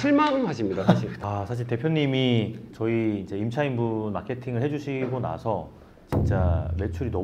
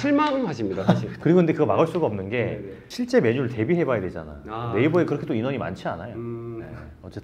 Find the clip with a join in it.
first; 1 cut; at 1.1 s

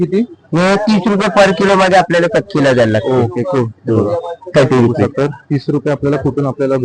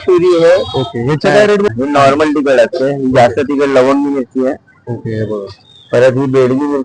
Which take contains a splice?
second; 1 cut; at 1.7 s

